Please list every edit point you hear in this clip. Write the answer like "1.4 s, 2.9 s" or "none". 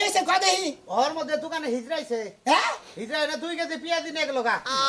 none